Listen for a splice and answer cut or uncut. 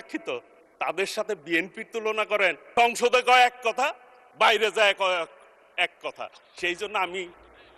cut